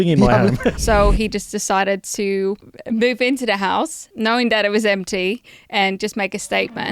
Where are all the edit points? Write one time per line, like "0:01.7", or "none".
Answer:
0:00.8
0:02.7
0:04.0